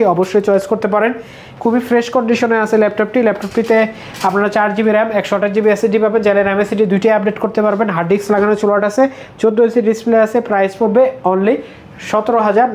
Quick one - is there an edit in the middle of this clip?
no; 0 cuts

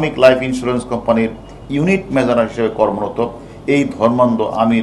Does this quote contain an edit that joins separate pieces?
no; 0 cuts

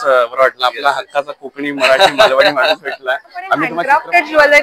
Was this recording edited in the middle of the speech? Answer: yes; 1 cut; at 3.7 s

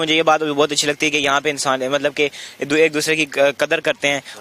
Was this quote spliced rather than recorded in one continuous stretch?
no; 0 cuts

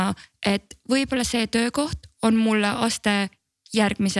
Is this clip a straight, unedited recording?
yes; 0 cuts

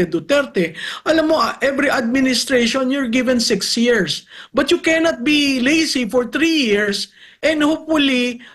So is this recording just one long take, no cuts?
yes; 0 cuts

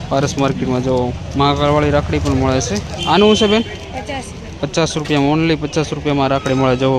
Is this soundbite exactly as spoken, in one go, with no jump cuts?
yes; 0 cuts

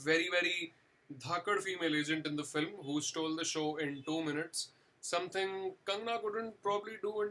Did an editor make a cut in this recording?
no; 0 cuts

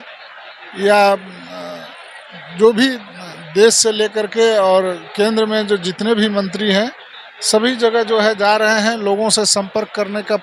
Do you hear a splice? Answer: no; 0 cuts

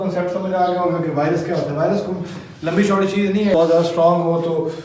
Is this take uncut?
no; 1 cut; at 3.5 s

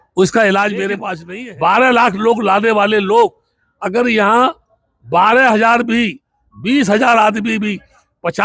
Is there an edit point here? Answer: yes; 1 cut; at 1.2 s

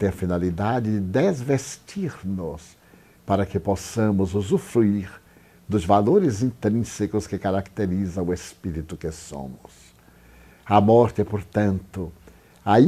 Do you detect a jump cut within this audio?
no; 0 cuts

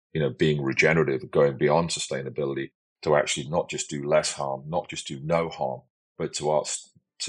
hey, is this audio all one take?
yes; 0 cuts

